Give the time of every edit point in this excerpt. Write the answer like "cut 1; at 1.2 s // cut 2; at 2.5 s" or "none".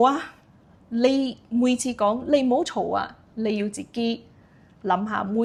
none

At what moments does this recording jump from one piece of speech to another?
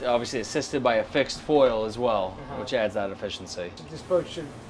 cut 1; at 3.8 s

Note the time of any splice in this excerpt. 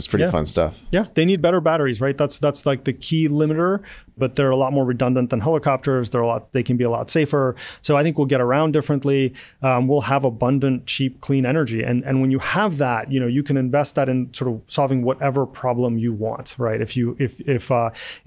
cut 1; at 4.1 s

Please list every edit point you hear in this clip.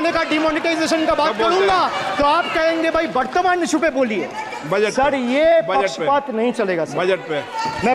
none

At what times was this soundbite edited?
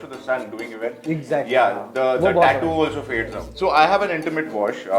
cut 1; at 3.4 s

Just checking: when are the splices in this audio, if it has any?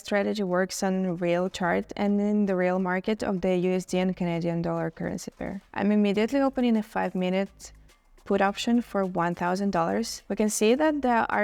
cut 1; at 5.6 s // cut 2; at 10.2 s

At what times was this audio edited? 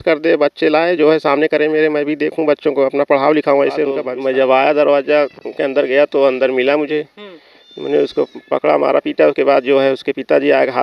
cut 1; at 4.0 s

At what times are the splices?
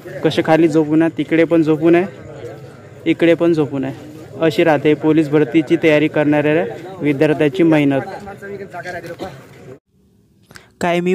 none

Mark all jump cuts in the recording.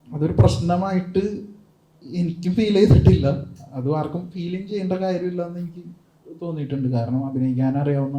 none

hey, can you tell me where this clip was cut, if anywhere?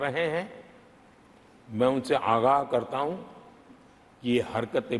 none

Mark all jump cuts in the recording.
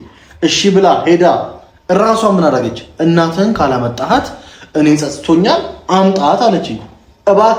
none

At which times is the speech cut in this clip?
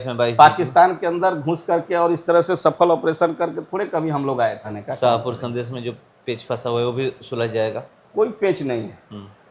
cut 1; at 4.7 s

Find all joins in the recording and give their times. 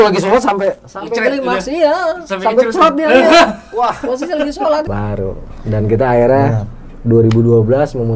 cut 1; at 4.9 s

